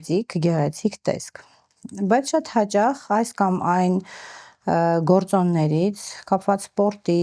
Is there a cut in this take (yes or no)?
no